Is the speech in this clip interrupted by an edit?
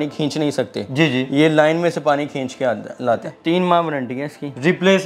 yes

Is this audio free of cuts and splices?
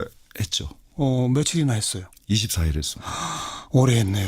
no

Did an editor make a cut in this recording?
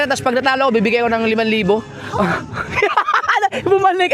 no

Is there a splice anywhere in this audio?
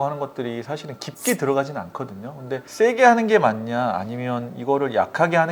no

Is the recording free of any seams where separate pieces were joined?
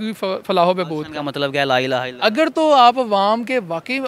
yes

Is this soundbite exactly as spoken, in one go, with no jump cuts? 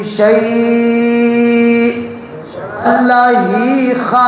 no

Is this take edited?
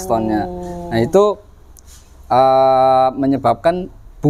no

